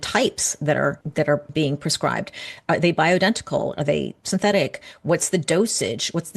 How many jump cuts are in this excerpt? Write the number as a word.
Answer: one